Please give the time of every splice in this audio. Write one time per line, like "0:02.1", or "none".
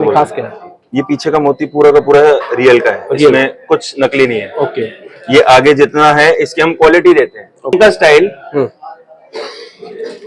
0:07.7